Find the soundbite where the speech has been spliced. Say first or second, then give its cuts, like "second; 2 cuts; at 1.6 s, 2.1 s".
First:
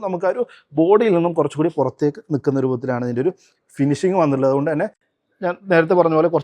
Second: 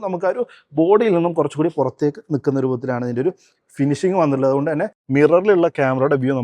second; 1 cut; at 5.0 s